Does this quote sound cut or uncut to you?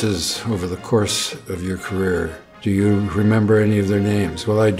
uncut